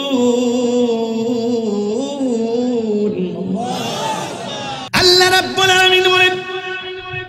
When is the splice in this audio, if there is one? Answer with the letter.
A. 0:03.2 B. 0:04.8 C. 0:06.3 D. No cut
B